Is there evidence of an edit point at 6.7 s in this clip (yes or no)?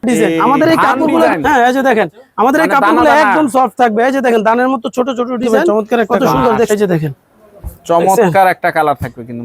yes